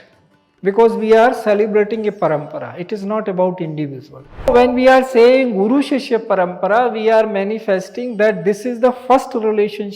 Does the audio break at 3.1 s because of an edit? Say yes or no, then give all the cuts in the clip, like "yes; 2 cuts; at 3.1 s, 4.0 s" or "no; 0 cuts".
no; 1 cut; at 4.5 s